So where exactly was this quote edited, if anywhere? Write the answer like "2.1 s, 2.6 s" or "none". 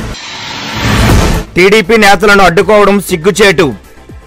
none